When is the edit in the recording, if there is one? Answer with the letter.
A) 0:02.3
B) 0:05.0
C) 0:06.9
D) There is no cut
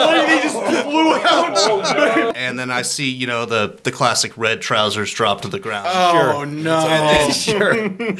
A